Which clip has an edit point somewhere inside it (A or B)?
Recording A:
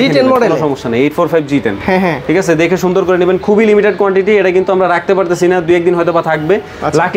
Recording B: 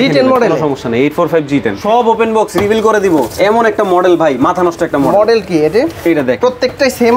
B